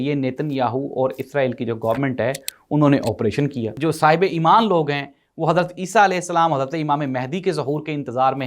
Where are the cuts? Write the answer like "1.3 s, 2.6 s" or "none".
3.7 s